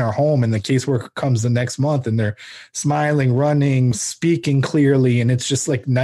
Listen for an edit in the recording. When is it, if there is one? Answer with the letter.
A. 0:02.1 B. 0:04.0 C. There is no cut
B